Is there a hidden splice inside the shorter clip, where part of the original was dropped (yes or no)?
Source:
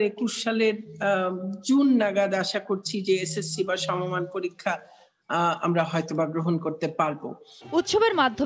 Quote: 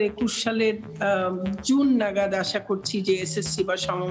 no